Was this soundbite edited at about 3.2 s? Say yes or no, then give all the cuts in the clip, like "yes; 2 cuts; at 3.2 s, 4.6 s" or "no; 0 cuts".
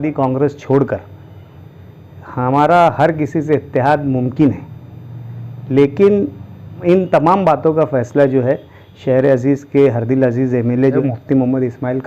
no; 2 cuts; at 6.8 s, 11.0 s